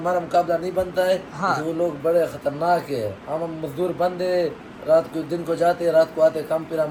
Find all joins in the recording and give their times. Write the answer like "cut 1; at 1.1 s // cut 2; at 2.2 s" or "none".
none